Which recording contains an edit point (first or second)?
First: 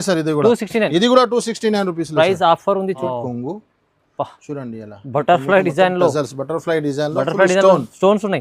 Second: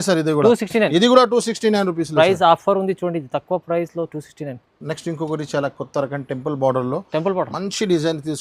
first